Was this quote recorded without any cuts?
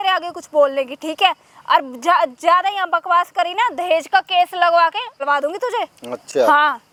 yes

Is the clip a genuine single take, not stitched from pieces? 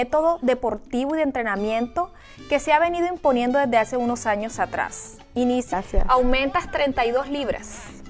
yes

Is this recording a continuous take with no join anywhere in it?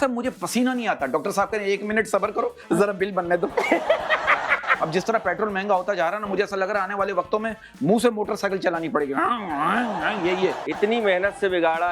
no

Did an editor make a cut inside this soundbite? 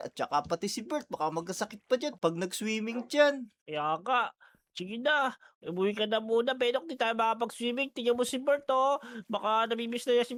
no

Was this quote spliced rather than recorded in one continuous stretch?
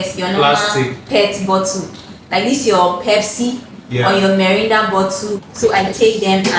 yes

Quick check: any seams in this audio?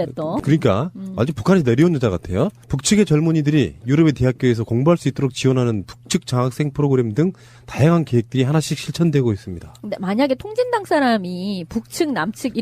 yes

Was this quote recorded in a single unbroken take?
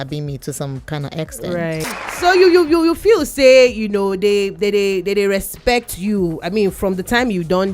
no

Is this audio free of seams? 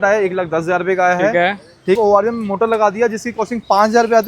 no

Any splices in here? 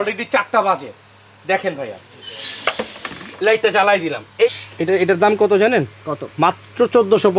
yes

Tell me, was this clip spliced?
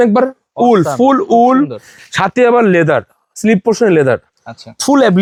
no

